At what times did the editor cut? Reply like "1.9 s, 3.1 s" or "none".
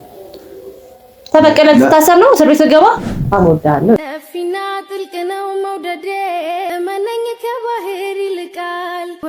3.1 s